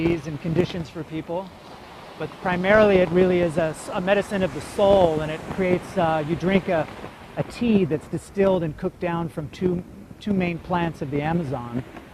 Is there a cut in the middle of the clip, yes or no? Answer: yes